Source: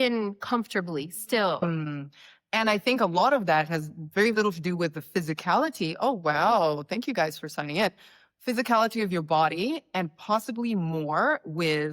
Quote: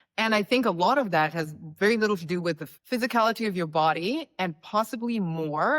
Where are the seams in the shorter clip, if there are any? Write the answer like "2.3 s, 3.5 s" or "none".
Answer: 2.7 s